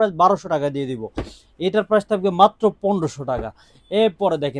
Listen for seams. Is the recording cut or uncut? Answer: uncut